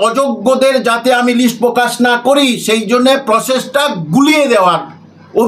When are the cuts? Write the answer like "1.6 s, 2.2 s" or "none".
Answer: none

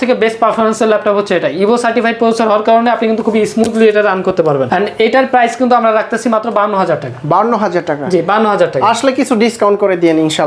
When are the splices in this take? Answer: none

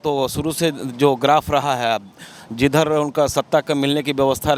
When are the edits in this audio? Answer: none

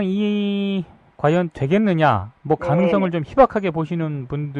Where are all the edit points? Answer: none

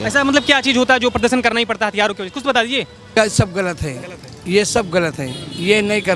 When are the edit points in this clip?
3.2 s

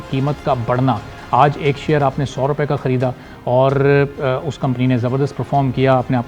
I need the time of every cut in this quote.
none

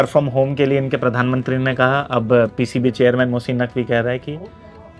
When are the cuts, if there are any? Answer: none

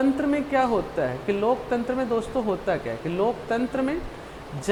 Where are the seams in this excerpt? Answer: none

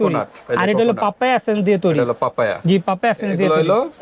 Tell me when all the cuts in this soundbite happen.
none

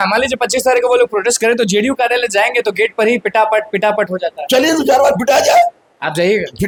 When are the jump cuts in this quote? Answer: none

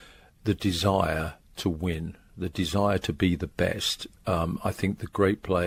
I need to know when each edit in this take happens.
none

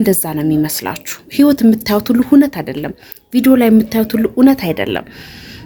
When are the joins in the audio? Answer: none

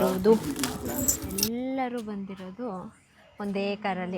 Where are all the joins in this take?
1.3 s

